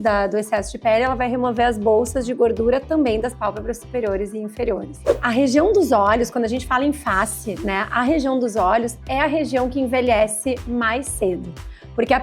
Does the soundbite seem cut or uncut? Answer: cut